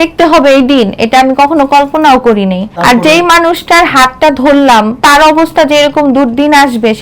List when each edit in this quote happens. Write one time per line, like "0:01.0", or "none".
0:02.7
0:05.0